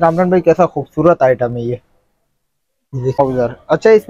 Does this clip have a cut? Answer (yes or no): yes